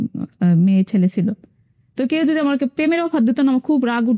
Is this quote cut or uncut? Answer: uncut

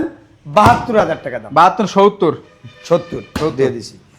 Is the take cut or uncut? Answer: uncut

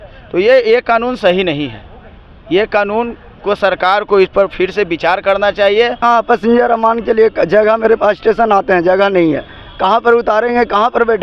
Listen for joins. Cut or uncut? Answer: cut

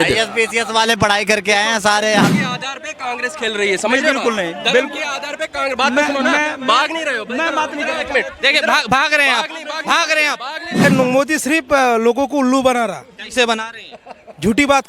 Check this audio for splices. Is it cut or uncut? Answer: cut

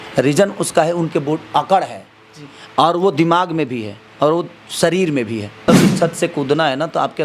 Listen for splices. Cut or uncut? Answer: cut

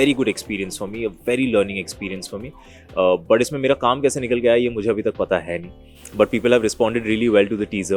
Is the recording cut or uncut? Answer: uncut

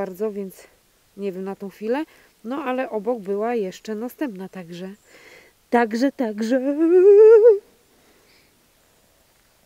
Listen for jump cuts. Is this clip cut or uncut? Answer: uncut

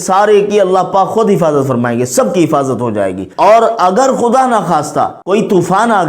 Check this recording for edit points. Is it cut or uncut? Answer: cut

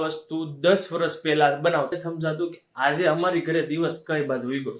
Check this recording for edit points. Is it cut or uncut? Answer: cut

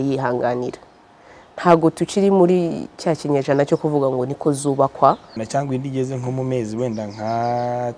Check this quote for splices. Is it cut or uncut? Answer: cut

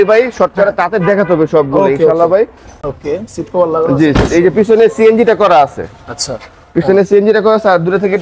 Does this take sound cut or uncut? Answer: cut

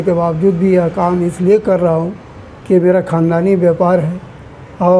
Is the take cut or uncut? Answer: uncut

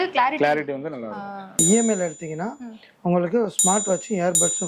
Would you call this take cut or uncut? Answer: cut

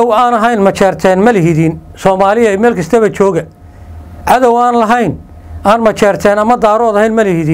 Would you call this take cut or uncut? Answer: uncut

